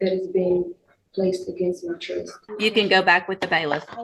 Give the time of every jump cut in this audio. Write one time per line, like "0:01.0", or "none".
0:02.4